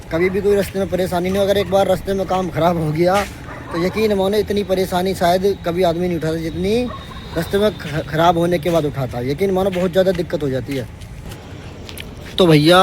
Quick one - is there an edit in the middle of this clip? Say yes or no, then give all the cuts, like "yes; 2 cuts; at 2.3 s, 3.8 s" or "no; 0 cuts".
yes; 1 cut; at 11.4 s